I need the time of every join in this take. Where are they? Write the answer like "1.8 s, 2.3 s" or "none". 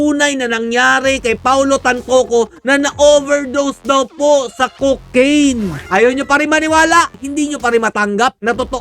5.8 s, 7.2 s